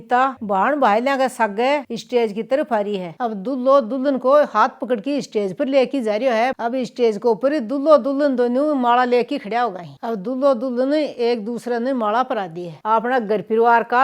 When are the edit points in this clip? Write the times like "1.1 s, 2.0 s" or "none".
3.1 s, 6.5 s, 12.7 s